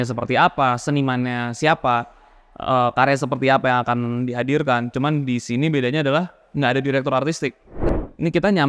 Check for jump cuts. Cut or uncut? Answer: cut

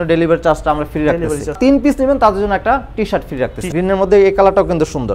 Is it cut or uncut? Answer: cut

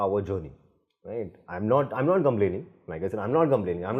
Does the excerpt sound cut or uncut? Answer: uncut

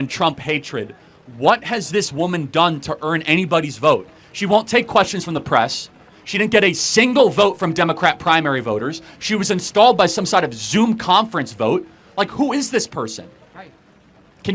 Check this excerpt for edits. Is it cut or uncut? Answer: uncut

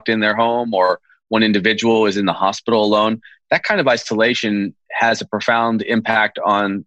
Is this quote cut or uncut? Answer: uncut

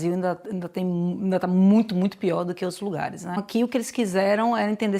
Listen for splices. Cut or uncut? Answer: cut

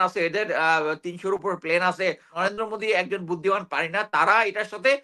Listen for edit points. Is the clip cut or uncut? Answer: cut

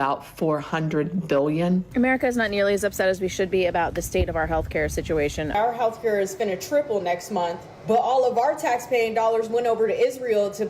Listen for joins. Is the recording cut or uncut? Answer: cut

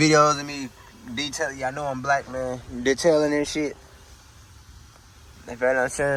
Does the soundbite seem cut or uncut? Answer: uncut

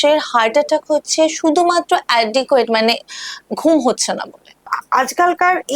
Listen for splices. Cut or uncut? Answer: cut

